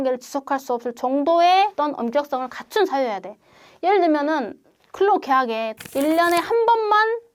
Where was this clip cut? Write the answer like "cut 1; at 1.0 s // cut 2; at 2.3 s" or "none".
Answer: cut 1; at 5.7 s